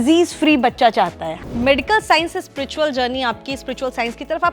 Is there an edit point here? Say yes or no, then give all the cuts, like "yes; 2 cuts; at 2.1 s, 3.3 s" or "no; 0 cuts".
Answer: yes; 1 cut; at 1.3 s